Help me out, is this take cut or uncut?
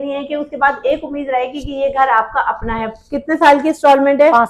uncut